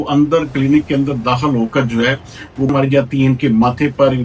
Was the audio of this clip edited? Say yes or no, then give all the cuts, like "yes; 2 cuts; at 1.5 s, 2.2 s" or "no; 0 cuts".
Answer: yes; 1 cut; at 2.7 s